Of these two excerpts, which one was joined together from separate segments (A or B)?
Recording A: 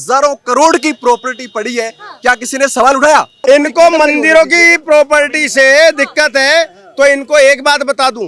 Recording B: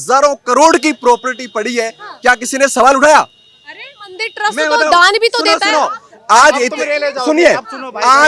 A